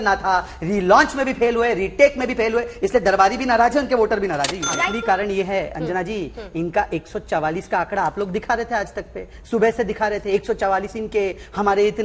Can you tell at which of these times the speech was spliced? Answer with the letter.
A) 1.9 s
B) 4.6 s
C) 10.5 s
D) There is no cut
B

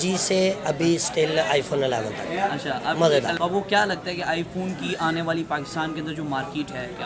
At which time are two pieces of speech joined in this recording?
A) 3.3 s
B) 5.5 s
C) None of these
A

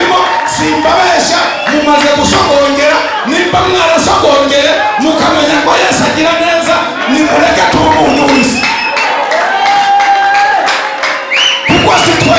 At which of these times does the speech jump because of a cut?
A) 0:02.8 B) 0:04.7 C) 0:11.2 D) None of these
D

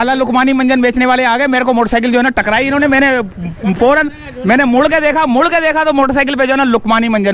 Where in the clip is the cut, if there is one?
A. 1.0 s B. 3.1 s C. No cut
C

